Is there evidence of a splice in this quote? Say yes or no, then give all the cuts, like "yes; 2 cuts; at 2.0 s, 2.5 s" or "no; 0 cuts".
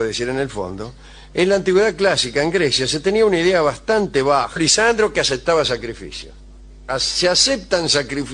no; 0 cuts